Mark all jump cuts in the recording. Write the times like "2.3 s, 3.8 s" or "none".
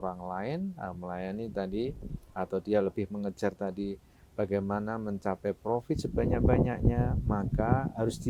none